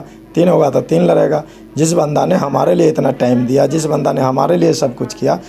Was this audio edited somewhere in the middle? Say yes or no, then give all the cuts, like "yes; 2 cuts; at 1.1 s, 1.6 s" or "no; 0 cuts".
no; 0 cuts